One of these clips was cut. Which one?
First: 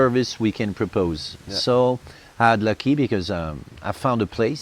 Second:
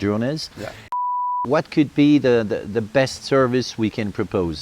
second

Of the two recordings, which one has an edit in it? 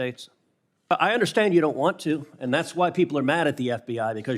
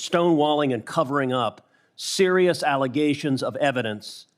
first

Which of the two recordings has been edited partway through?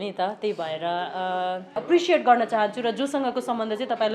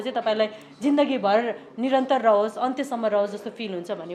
first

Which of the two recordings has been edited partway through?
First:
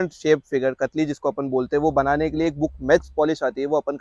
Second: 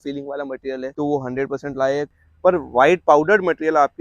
second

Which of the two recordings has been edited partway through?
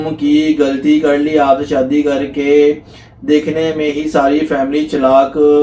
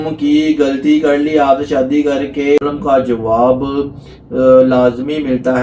second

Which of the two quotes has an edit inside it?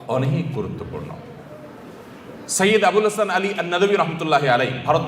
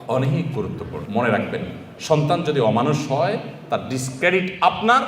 second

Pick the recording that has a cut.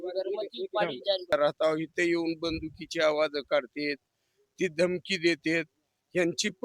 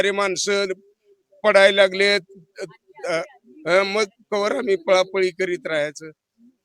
first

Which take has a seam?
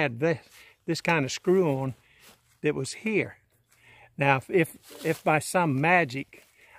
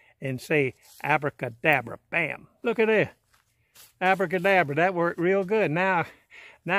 second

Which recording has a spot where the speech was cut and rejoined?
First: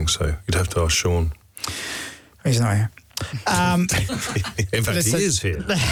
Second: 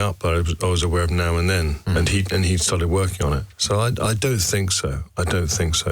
second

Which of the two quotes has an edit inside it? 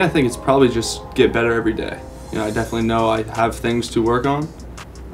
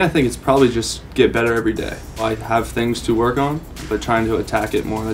second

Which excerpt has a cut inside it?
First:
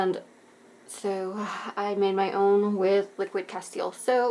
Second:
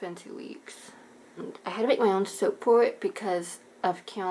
second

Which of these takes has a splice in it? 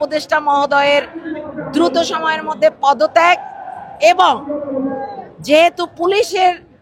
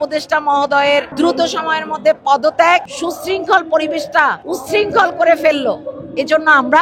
second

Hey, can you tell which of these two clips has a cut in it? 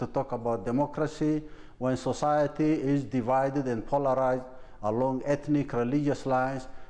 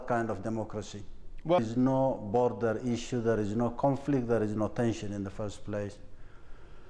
second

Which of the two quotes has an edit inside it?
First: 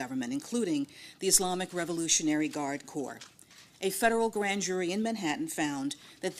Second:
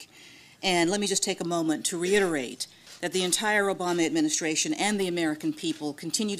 first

